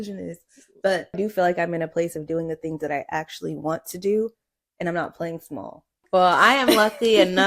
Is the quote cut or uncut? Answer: cut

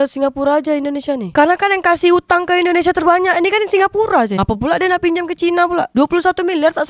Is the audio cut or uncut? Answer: uncut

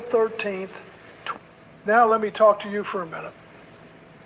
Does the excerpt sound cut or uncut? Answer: cut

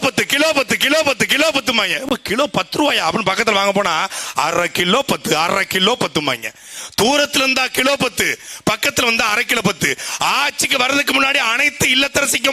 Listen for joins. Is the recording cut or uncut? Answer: uncut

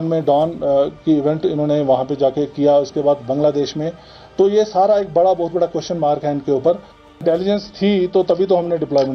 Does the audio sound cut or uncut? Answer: cut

